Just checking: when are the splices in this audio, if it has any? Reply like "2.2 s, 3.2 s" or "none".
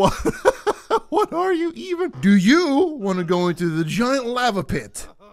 2.1 s